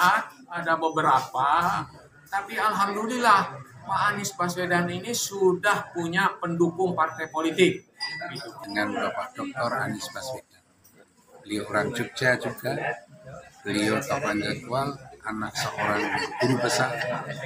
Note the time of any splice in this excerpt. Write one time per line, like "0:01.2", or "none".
0:08.6